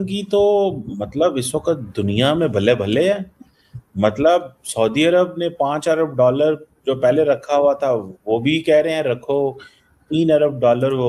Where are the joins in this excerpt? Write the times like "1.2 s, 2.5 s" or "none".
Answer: none